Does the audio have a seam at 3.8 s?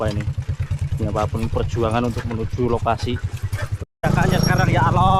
yes; 1 cut; at 3.8 s

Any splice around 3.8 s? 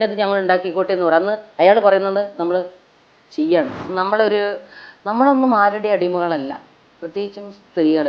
yes; 1 cut; at 3.8 s

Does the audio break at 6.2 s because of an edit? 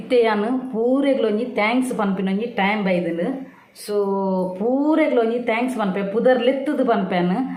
no; 0 cuts

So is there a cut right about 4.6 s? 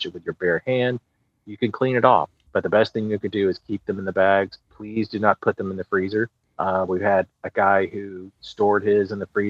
no; 2 cuts; at 2.4 s, 6.4 s

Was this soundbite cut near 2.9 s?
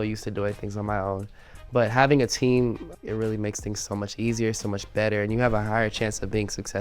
yes; 1 cut; at 2.9 s

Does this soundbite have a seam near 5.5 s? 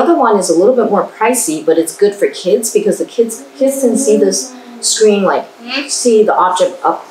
no; 1 cut; at 3.4 s

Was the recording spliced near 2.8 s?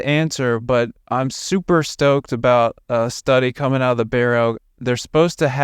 no; 1 cut; at 4.6 s

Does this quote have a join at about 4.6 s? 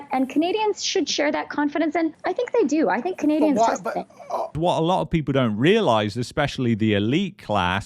yes; 1 cut; at 4.6 s

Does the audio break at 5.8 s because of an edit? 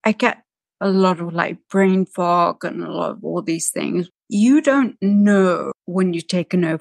yes; 2 cuts; at 4.1 s, 5.8 s

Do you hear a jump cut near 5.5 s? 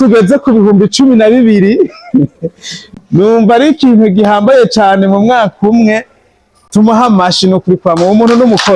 no; 0 cuts

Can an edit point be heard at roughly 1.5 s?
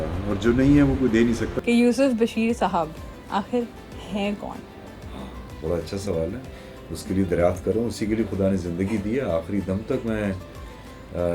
yes; 1 cut; at 1.5 s

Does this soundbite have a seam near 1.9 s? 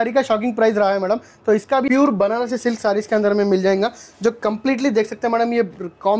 yes; 1 cut; at 1.9 s

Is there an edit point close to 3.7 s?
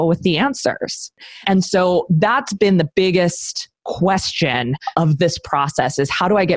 no; 1 cut; at 1.2 s

